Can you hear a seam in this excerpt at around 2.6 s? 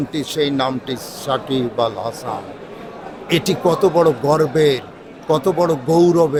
no; 0 cuts

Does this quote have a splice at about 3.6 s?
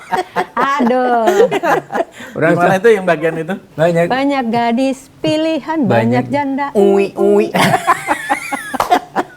yes; 1 cut; at 3.6 s

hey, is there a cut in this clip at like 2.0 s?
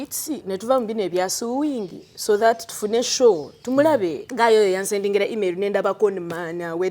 no; 1 cut; at 4.2 s

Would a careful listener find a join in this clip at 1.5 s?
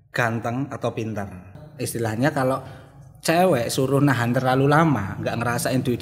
yes; 1 cut; at 1.5 s

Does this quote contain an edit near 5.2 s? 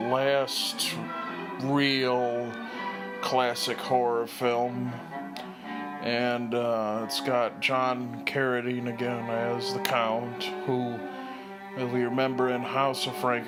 no; 0 cuts

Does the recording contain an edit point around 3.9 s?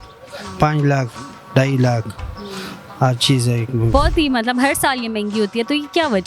yes; 1 cut; at 3.9 s

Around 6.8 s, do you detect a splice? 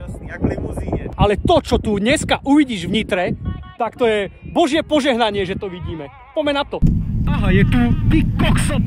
yes; 2 cuts; at 1.1 s, 6.8 s

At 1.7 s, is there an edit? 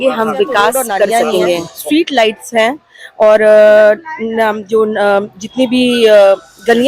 yes; 1 cut; at 1.7 s

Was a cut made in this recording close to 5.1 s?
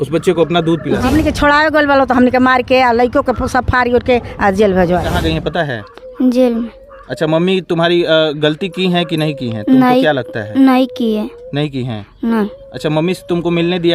yes; 2 cuts; at 1.0 s, 5.1 s

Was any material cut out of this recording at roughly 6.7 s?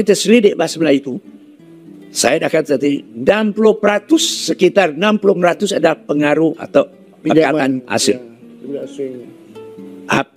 no; 0 cuts

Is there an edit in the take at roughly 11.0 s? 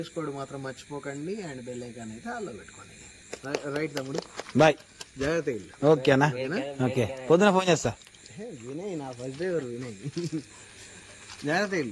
no; 1 cut; at 3.2 s

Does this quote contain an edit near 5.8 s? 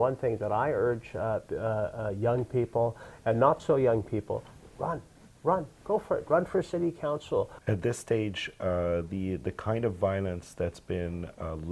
no; 1 cut; at 7.6 s

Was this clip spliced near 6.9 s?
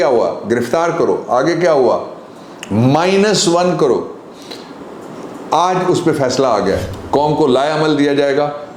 yes; 1 cut; at 6.9 s

